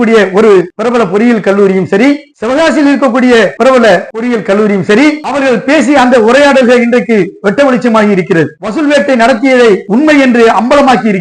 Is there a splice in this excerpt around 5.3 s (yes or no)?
yes